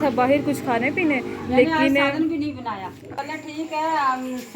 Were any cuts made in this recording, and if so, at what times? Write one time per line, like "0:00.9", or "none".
0:03.2